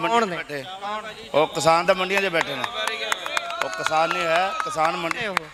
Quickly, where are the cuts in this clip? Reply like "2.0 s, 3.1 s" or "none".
none